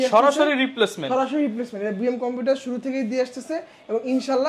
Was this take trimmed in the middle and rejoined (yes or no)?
no